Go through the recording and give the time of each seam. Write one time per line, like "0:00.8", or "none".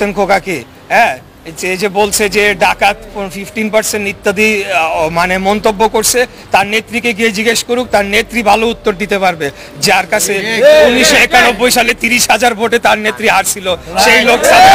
none